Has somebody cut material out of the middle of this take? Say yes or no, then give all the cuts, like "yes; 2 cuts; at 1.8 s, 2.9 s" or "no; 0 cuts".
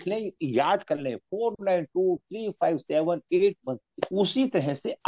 yes; 1 cut; at 3.9 s